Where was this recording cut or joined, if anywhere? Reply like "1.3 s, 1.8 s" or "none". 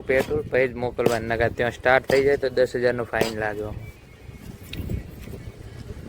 none